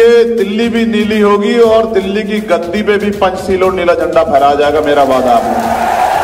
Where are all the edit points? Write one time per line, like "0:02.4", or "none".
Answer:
none